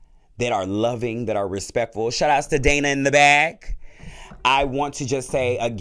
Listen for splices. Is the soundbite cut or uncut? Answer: uncut